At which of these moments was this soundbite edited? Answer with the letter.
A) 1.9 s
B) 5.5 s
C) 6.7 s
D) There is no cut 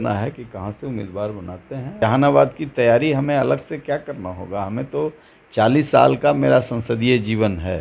A